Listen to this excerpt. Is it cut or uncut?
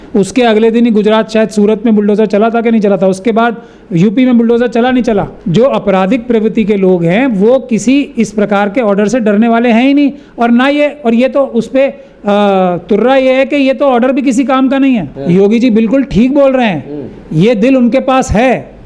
cut